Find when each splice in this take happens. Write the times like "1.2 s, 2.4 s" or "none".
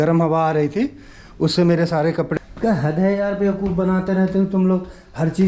2.3 s